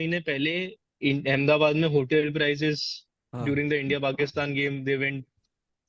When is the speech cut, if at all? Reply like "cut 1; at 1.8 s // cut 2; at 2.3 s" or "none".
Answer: none